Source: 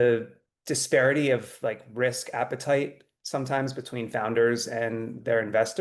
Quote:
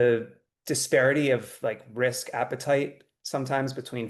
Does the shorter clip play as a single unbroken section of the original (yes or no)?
yes